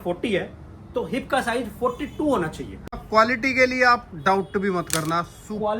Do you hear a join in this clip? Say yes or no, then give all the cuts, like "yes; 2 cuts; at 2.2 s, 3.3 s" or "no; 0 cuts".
yes; 1 cut; at 2.9 s